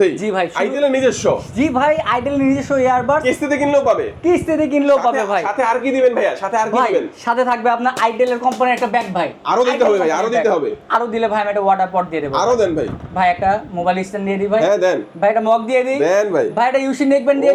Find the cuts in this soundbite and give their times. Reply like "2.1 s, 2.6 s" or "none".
none